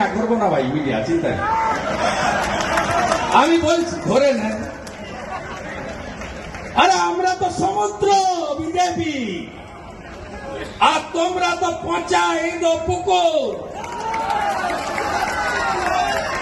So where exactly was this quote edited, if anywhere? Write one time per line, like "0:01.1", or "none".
none

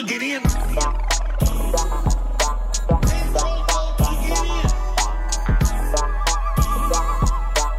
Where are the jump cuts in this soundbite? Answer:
none

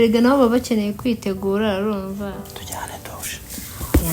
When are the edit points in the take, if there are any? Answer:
0:02.4

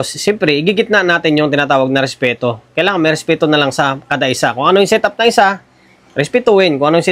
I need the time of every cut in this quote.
none

